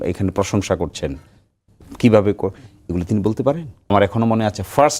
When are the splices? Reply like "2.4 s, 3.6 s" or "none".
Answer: 3.9 s